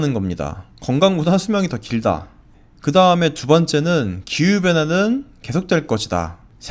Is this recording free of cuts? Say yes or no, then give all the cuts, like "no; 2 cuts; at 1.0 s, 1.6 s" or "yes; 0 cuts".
yes; 0 cuts